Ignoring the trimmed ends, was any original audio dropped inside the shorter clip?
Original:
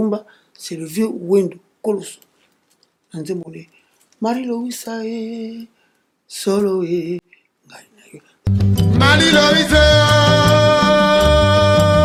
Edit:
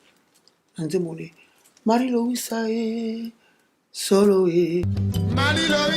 yes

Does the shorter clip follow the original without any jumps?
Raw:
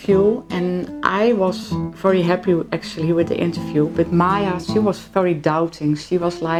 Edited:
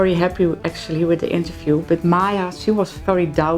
yes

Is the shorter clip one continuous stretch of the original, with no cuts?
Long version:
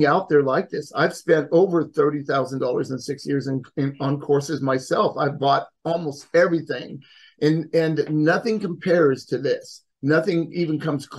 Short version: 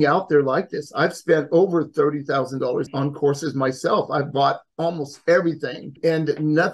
no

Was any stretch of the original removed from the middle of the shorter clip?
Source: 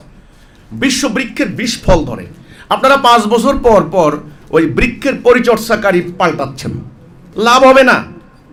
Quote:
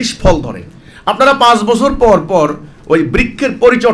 no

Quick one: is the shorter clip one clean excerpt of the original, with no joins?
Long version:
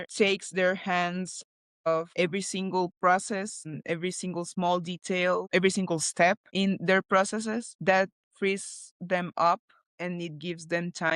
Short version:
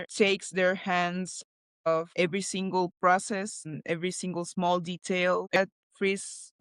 no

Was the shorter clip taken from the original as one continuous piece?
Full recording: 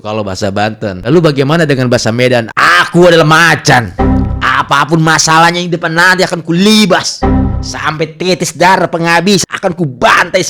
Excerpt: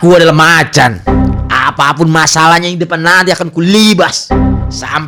yes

